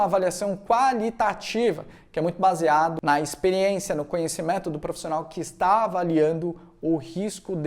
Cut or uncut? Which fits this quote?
cut